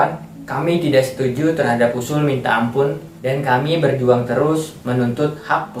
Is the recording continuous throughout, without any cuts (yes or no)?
yes